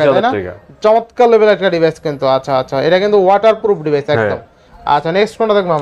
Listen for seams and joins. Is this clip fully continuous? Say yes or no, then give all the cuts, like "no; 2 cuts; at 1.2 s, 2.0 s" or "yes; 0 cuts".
yes; 0 cuts